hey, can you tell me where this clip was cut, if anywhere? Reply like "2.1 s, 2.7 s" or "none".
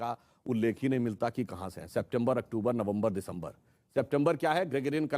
none